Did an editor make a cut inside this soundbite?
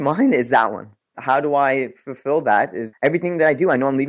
yes; 2 cuts; at 1.1 s, 2.8 s

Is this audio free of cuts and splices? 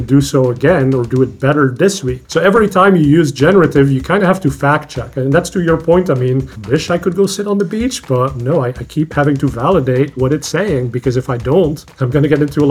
yes; 0 cuts

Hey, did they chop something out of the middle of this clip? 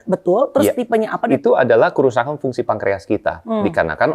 yes; 1 cut; at 1.2 s

